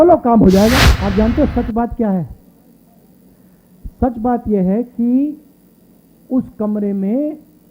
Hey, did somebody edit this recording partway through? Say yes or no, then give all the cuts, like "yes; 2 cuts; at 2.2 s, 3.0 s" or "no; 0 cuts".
yes; 1 cut; at 0.9 s